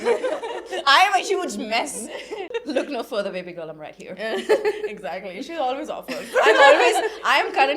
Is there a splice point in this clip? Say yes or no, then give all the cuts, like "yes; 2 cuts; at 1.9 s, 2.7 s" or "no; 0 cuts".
yes; 1 cut; at 2.5 s